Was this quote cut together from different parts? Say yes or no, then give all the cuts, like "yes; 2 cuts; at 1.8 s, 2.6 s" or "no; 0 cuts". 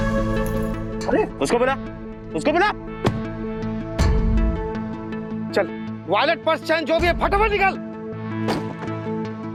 no; 0 cuts